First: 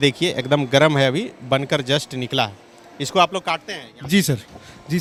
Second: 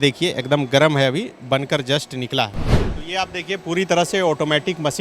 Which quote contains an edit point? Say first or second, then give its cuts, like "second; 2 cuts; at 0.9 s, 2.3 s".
second; 1 cut; at 2.9 s